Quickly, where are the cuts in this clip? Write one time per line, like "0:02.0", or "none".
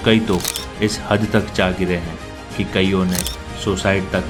none

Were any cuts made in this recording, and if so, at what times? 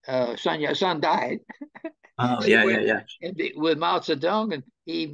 none

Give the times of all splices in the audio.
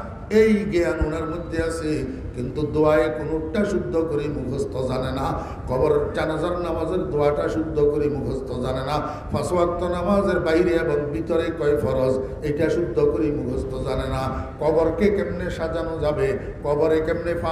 none

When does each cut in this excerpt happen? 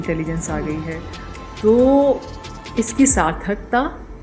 0:01.5

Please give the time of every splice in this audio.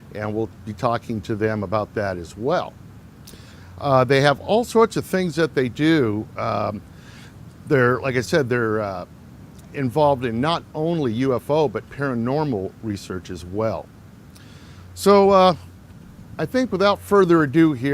0:10.8

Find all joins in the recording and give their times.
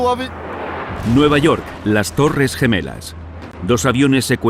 0:01.4

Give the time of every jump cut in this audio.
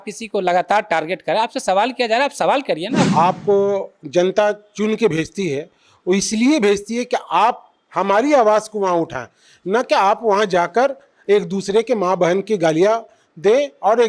0:03.1

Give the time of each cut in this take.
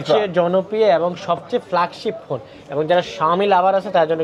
none

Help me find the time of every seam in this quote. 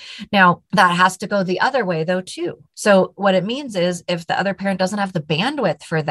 0:02.7

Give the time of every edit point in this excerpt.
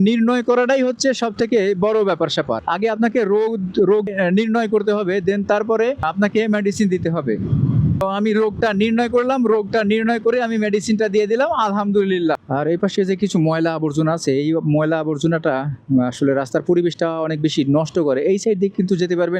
0:04.1
0:12.4

